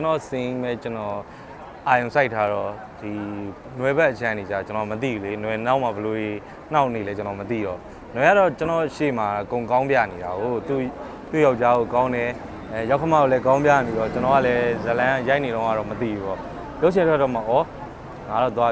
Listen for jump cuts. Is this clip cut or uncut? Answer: uncut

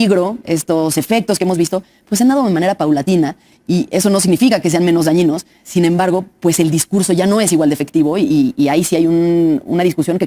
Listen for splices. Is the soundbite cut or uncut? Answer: uncut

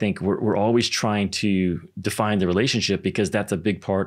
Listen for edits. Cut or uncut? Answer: uncut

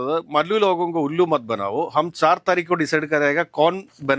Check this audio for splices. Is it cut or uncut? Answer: uncut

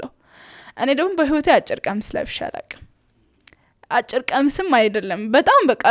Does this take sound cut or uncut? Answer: uncut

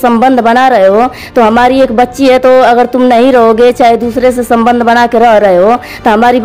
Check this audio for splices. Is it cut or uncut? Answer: uncut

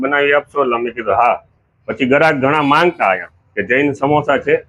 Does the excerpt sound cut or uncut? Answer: uncut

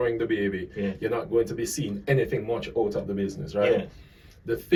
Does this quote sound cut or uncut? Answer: uncut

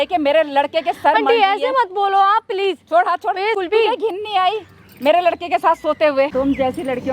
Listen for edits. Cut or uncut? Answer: cut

